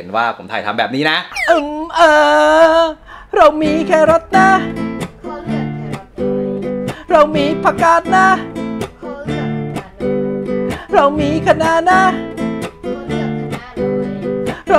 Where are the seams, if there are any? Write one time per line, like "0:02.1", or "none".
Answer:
0:01.3